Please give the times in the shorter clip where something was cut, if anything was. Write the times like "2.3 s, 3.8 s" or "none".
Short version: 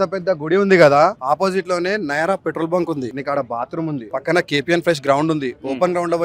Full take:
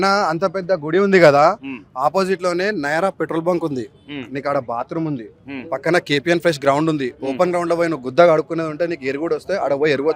1.2 s, 3.2 s, 4.1 s